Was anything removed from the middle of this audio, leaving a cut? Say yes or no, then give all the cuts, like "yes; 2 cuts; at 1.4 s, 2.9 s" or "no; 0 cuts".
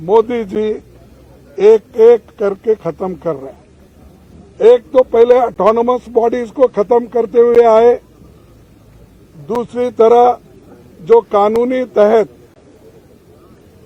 no; 0 cuts